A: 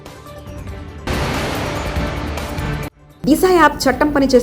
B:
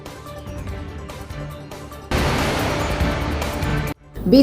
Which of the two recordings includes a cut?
A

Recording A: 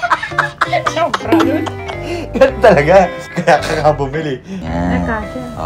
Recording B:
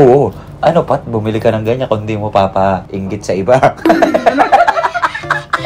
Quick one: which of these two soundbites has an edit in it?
A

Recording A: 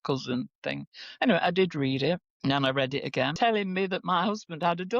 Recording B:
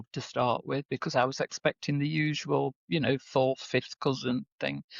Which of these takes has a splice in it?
A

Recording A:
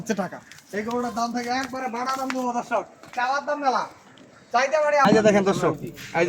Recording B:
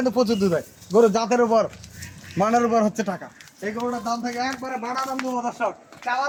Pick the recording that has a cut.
A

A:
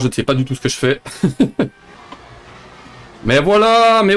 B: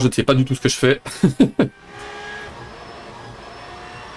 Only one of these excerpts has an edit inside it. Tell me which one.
A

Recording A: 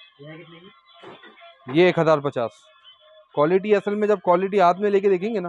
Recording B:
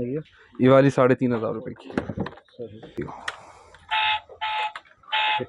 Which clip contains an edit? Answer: B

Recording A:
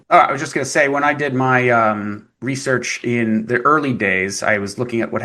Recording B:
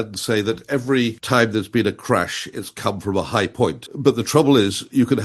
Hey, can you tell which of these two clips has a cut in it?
B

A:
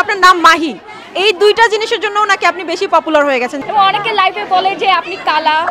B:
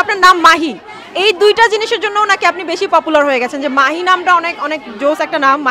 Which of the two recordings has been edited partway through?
A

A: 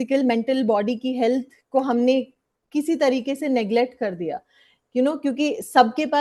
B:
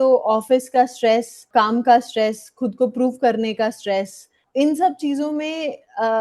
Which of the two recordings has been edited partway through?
B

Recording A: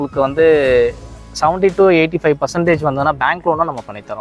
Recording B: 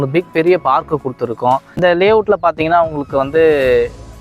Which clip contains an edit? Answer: B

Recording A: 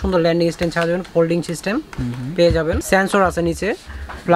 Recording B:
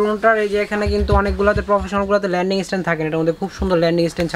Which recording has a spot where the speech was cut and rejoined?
A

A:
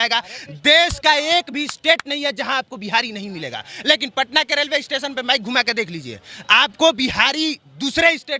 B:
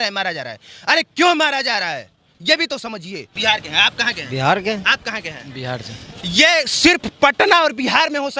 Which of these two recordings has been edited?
B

